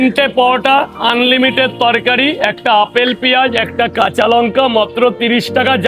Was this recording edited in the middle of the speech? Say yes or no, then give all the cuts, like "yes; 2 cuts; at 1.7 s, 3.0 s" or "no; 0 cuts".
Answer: no; 0 cuts